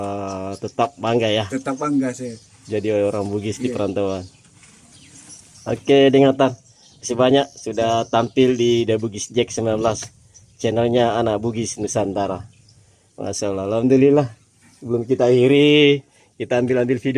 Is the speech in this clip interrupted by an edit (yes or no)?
no